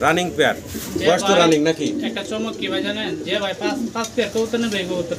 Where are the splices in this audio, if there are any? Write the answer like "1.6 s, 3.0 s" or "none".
0.9 s